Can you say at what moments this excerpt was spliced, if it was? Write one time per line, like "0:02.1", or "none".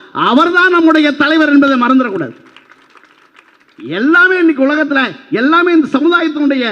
none